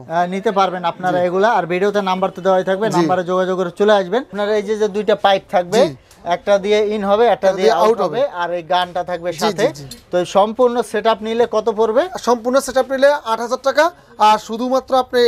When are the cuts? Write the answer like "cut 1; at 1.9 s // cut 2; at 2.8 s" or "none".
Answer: cut 1; at 4.3 s